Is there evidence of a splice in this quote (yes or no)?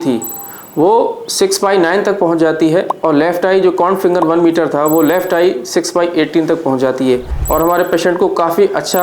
yes